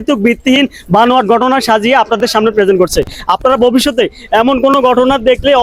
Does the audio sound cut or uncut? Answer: uncut